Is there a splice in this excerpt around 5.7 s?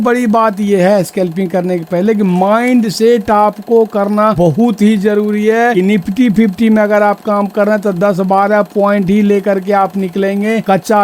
yes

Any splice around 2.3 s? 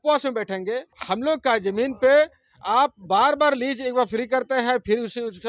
no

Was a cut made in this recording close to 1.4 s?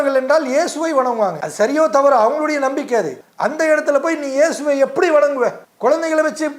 yes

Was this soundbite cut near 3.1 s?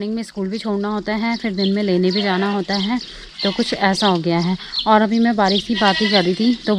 no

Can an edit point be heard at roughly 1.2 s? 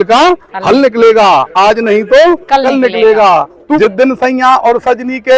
no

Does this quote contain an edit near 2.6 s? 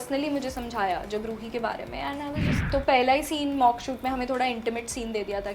yes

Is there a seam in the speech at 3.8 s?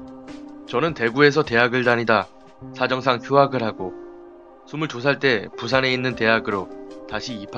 yes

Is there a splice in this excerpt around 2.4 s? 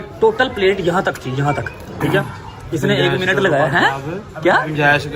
no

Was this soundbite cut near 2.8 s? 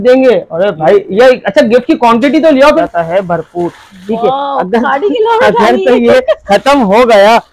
yes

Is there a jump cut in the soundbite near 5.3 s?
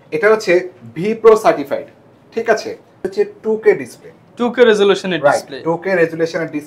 no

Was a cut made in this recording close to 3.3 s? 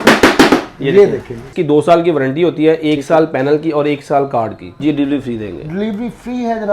no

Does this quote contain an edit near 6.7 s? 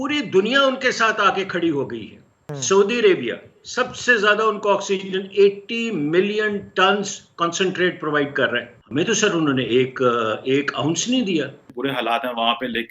no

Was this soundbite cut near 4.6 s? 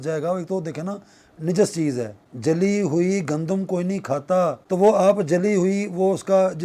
yes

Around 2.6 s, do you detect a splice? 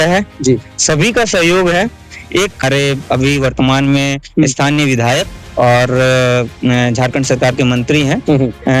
yes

